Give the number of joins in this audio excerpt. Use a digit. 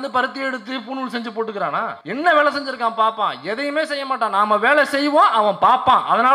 1